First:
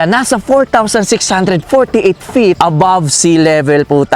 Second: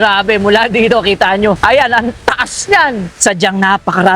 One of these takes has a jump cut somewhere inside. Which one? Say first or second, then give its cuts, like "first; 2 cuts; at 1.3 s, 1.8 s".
second; 2 cuts; at 1.6 s, 3.1 s